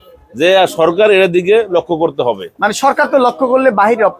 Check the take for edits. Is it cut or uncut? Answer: uncut